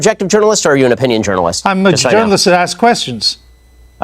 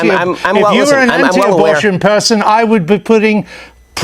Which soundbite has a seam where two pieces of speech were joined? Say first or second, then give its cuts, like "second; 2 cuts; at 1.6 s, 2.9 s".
first; 1 cut; at 1.8 s